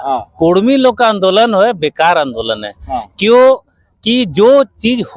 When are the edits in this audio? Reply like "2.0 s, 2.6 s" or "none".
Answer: none